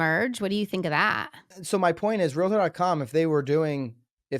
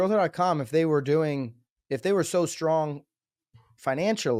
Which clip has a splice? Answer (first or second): first